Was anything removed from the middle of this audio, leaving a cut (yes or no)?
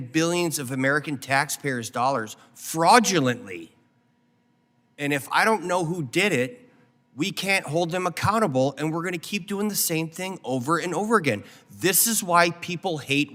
no